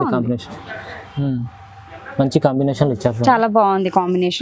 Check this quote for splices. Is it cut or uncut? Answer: uncut